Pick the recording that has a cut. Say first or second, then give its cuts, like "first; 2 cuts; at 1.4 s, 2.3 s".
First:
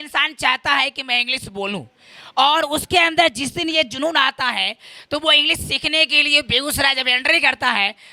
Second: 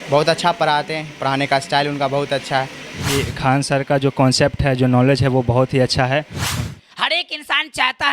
second; 2 cuts; at 3.1 s, 6.4 s